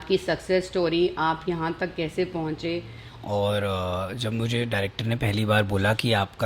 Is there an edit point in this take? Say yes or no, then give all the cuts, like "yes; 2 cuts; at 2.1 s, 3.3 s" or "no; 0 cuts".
yes; 1 cut; at 3.1 s